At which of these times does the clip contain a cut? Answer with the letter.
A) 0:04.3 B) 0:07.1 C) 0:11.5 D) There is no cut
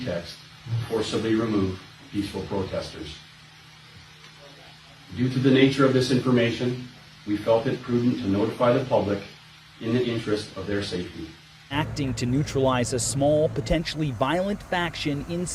C